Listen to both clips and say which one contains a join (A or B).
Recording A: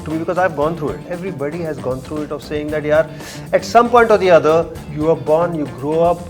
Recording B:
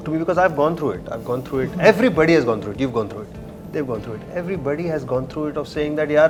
A